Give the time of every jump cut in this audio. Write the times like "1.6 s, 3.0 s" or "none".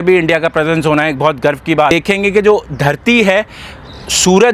1.9 s

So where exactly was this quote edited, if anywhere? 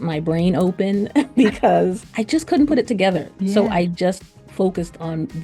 2.1 s, 3.3 s

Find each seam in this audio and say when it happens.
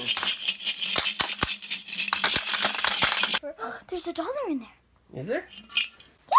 3.4 s

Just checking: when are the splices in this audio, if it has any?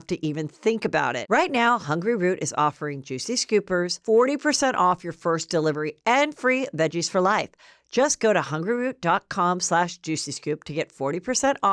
1.2 s

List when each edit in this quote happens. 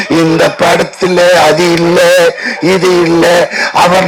none

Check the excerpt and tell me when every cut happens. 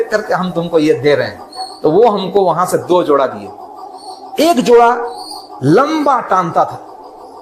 none

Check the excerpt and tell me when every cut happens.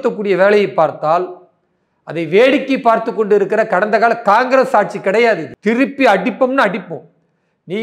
5.5 s

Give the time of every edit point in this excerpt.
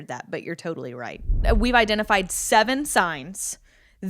1.4 s

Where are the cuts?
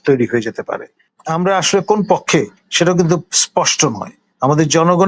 1.1 s

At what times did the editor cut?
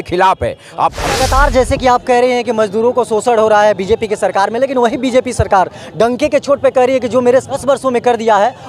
1.0 s, 7.6 s

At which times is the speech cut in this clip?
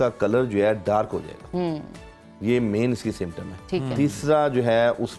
none

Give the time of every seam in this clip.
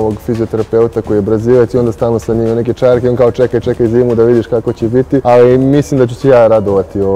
5.2 s

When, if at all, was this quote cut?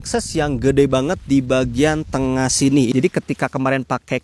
2.9 s

